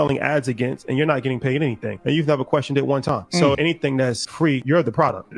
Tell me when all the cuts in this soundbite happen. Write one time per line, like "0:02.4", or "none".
0:02.2